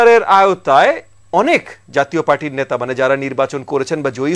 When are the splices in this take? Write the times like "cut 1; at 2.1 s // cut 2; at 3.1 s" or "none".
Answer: none